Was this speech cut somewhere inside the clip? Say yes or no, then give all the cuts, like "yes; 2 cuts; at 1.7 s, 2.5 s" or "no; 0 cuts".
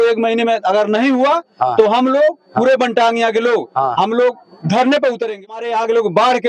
yes; 1 cut; at 5.5 s